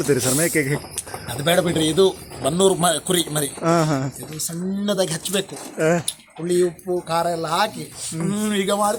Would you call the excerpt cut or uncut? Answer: uncut